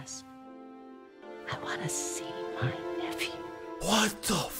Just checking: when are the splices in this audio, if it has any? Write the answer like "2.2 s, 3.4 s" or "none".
1.2 s